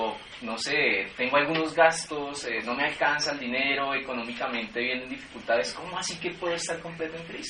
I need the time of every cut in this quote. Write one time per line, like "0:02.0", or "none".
0:03.7